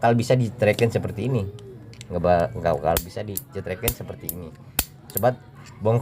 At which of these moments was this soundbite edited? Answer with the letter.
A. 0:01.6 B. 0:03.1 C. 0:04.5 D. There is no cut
D